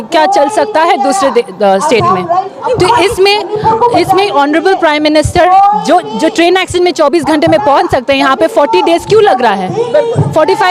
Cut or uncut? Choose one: cut